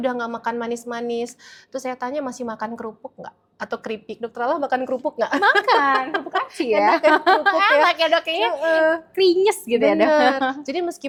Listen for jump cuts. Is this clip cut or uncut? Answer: uncut